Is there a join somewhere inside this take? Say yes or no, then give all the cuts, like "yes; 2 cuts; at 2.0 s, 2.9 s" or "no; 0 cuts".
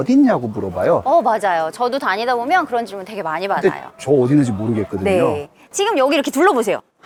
no; 0 cuts